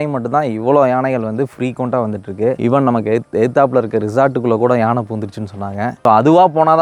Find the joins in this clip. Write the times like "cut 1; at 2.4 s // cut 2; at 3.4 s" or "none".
none